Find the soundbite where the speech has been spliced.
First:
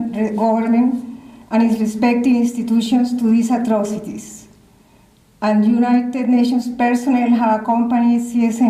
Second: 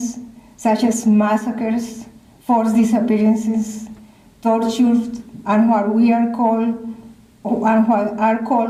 first; 1 cut; at 6.7 s

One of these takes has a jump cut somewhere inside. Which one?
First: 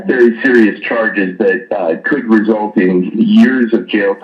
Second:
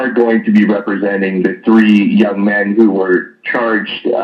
first; 1 cut; at 2.9 s

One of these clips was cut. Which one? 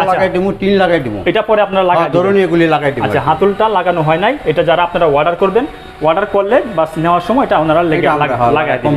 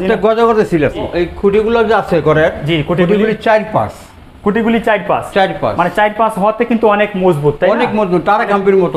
second; 1 cut; at 1.1 s

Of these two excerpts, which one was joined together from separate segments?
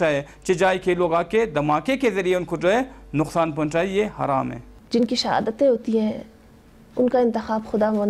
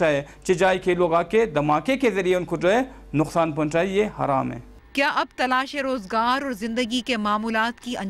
first; 1 cut; at 4.7 s

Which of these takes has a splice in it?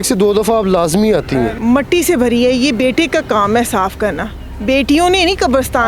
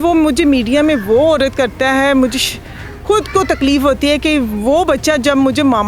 first; 1 cut; at 1.5 s

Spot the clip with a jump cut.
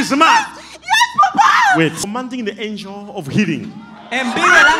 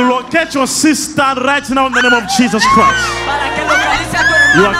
first; 1 cut; at 2.1 s

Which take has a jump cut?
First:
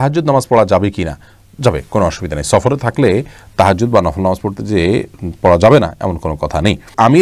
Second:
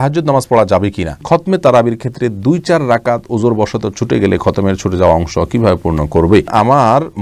second; 2 cuts; at 1.2 s, 6.5 s

